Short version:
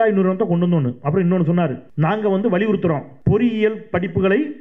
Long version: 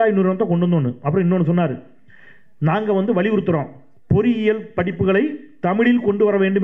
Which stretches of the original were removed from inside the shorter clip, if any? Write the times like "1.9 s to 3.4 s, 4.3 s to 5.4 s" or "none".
1.8 s to 2.5 s, 3.8 s to 4.0 s